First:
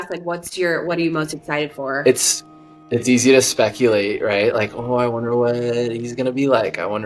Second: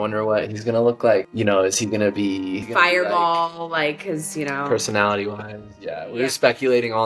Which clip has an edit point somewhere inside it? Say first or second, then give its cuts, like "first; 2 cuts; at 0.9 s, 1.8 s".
second; 2 cuts; at 1.3 s, 2.6 s